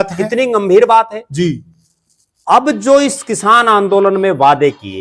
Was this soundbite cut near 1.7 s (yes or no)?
no